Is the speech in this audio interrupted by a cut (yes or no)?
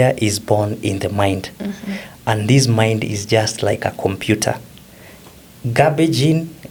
no